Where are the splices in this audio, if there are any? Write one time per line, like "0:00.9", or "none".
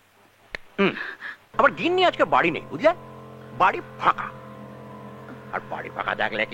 0:01.4